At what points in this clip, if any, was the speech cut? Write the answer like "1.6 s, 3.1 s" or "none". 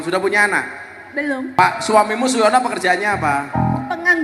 1.5 s

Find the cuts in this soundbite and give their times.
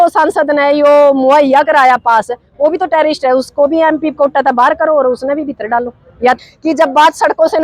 6.4 s

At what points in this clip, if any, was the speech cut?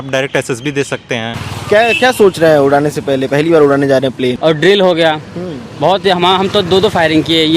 1.5 s, 4.4 s

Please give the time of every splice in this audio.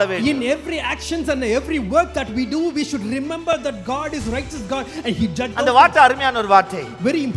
5.5 s

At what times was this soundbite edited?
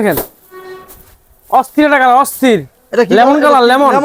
none

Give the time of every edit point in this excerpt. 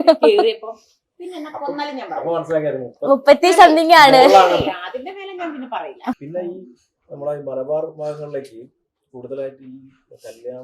6.2 s

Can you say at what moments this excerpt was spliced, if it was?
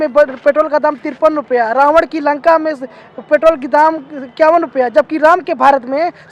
none

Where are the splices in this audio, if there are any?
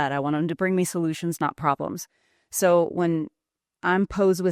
none

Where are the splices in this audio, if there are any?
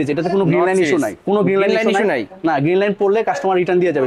none

